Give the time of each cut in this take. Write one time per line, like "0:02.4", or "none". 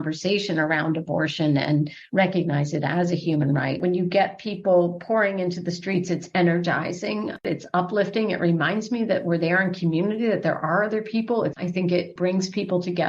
0:03.8
0:07.5
0:11.6